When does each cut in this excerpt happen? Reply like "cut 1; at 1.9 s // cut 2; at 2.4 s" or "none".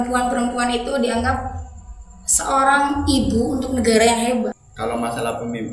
cut 1; at 4.6 s